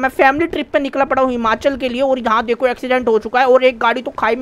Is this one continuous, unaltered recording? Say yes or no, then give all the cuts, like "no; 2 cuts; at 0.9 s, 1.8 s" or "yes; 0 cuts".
yes; 0 cuts